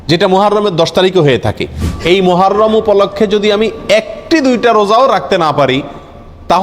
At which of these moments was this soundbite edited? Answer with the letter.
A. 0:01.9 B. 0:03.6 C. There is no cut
A